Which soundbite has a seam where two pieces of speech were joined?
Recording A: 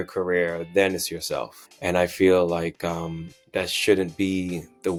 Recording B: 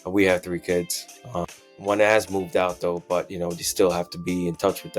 B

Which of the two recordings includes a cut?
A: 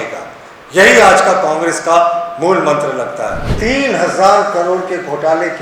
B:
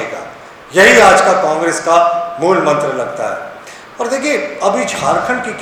A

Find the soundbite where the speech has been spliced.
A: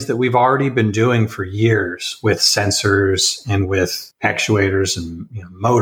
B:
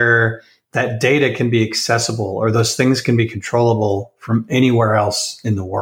A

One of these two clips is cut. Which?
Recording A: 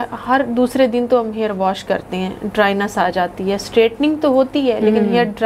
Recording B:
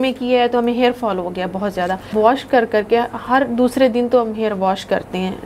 B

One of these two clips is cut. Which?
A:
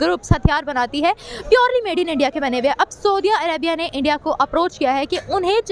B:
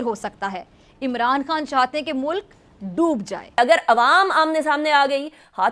B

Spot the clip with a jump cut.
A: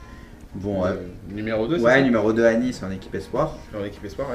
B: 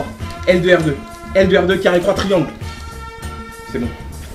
A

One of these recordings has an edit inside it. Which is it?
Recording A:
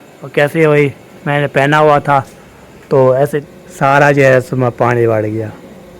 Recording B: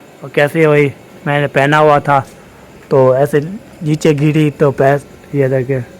A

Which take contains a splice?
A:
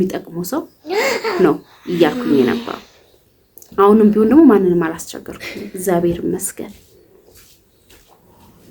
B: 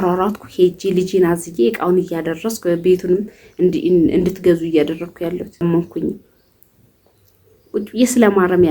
B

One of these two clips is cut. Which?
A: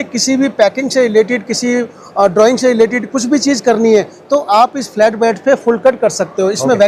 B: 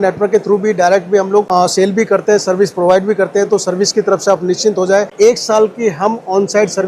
B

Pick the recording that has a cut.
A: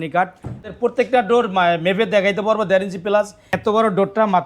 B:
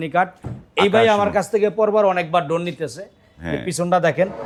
A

